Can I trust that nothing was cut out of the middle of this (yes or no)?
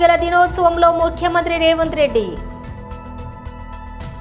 no